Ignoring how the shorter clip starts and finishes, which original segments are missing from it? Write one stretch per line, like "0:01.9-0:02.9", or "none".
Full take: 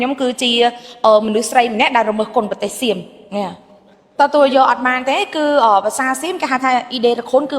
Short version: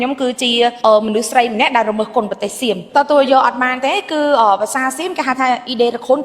0:00.8-0:01.0
0:03.0-0:04.1